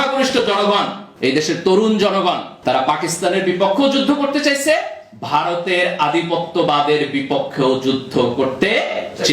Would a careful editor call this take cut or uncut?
cut